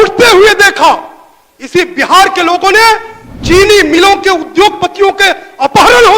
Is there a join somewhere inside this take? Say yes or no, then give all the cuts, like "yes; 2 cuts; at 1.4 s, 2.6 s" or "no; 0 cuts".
no; 0 cuts